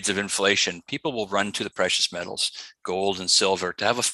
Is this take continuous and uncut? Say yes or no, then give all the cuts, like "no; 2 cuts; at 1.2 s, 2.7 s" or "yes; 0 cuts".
yes; 0 cuts